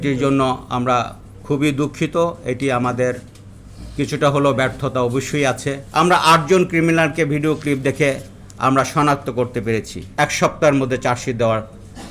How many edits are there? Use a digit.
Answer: 2